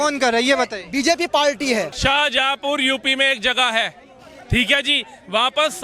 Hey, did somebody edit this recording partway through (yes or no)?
yes